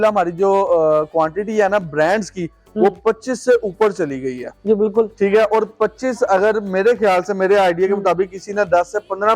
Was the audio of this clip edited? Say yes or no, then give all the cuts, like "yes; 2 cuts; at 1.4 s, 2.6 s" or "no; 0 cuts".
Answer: no; 0 cuts